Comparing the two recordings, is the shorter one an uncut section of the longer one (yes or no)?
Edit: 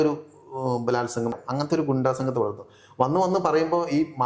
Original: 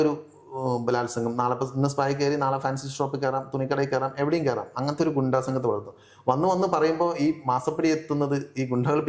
no